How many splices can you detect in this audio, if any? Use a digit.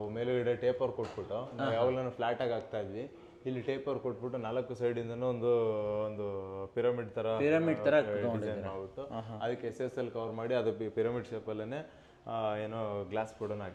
0